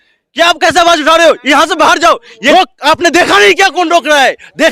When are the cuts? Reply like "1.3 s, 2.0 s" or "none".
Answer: 2.5 s

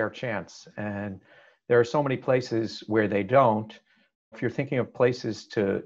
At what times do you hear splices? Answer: 4.3 s

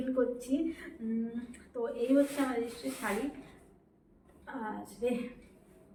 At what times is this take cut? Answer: none

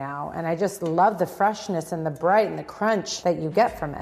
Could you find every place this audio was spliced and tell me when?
3.1 s

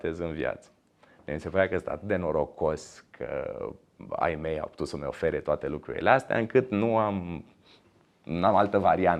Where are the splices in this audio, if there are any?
none

